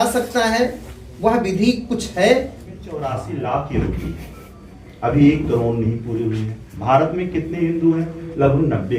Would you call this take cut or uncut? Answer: cut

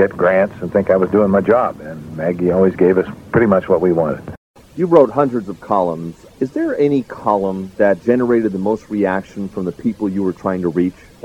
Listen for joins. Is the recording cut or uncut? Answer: cut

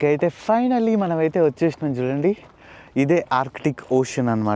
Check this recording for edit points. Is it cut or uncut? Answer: uncut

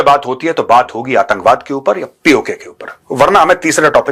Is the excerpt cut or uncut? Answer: uncut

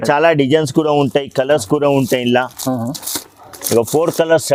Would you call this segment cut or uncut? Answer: uncut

